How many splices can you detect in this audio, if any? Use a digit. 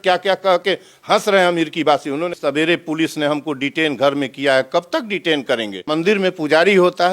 2